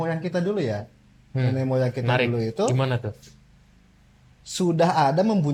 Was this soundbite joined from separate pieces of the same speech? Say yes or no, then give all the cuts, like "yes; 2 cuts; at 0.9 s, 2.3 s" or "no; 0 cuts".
no; 0 cuts